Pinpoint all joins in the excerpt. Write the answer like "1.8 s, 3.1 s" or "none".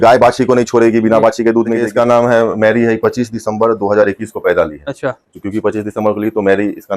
1.8 s

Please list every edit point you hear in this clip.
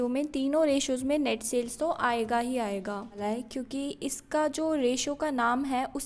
3.2 s

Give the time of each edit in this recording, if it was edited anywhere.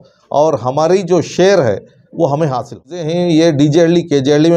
3.0 s

